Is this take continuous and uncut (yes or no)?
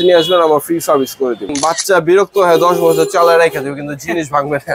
no